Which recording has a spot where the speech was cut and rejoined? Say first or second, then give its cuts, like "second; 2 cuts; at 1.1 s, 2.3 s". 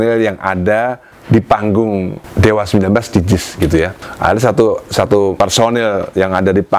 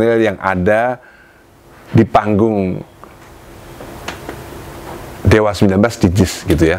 first; 4 cuts; at 1.1 s, 2.2 s, 4.0 s, 5.3 s